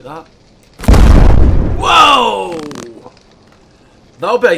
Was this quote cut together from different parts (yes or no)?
no